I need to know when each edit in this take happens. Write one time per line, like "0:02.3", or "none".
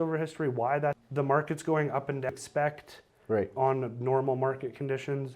0:01.0
0:02.3